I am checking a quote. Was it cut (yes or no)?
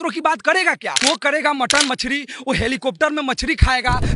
yes